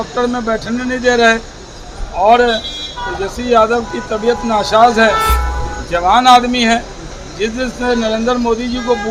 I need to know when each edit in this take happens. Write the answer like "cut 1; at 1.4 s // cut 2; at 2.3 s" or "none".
none